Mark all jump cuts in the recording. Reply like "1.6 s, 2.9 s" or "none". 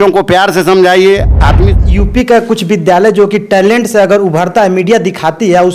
1.6 s